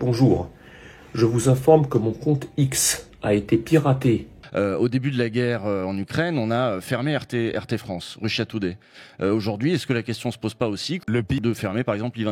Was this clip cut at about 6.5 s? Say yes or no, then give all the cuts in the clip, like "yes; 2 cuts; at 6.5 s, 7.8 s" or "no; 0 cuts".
no; 2 cuts; at 4.3 s, 11.4 s